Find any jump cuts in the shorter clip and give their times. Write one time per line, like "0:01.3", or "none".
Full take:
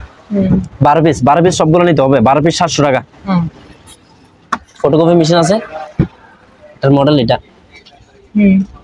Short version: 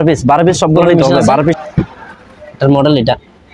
0:01.6

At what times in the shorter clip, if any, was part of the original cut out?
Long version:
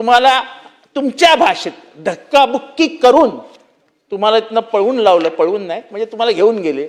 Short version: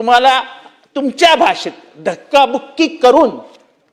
none

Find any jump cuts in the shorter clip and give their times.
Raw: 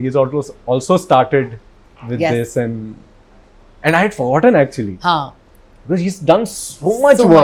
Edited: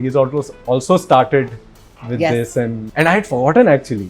0:02.8

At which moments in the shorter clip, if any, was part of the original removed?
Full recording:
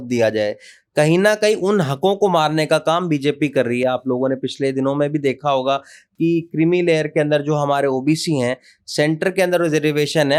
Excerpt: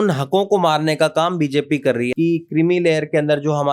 0:02.1

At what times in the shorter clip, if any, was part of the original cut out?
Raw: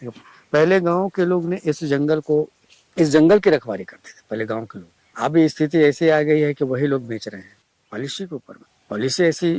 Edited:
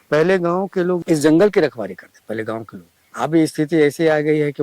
0:01.0
0:02.1

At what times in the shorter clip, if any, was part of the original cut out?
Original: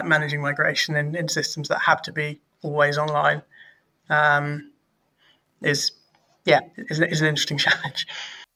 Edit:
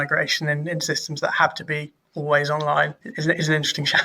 0:03.1

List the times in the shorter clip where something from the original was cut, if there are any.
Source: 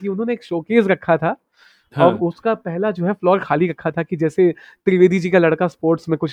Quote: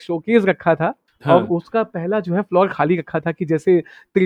0:01.1

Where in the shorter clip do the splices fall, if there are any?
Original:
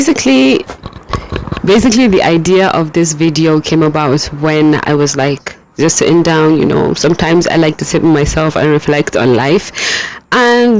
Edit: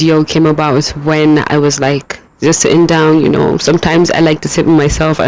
none

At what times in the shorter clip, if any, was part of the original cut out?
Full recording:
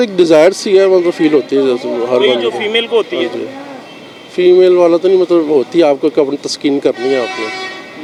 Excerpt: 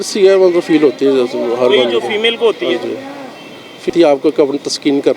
0:03.9

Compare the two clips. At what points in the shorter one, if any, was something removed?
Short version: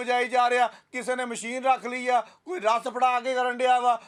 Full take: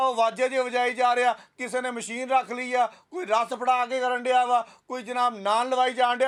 none

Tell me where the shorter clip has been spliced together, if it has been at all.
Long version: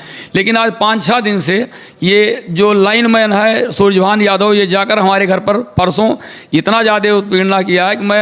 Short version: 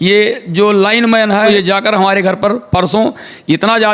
0:01.5

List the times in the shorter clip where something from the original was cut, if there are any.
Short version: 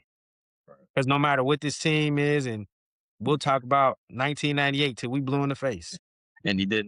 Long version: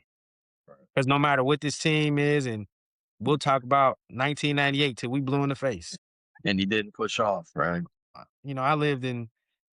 none

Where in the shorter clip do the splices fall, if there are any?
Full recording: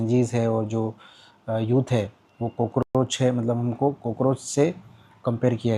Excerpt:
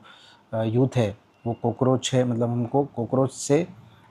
0:01.9

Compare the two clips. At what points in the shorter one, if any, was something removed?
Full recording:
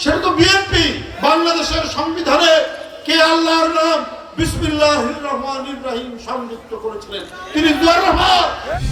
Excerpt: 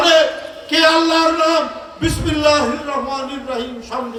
none

